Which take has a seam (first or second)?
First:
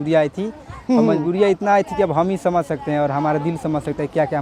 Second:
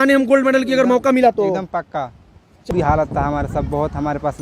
second